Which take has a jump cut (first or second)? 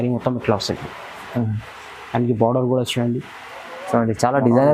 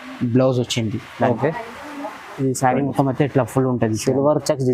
second